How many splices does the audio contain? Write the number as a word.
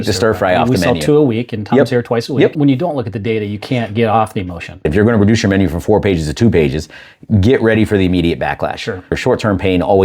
three